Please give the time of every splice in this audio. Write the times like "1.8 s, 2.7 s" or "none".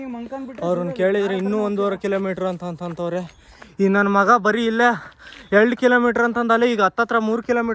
none